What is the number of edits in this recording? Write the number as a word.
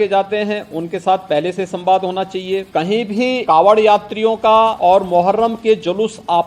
three